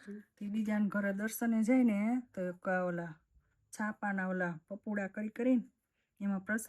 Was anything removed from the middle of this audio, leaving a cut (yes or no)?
no